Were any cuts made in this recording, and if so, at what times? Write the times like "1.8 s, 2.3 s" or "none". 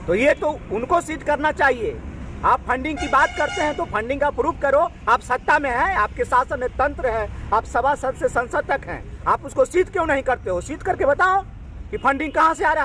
none